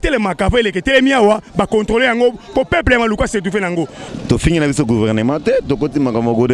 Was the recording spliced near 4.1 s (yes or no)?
yes